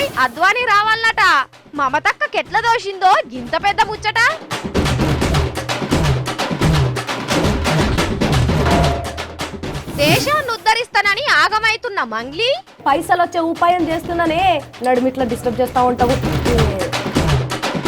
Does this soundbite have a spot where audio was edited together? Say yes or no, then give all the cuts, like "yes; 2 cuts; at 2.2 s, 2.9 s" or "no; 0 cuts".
yes; 1 cut; at 4.4 s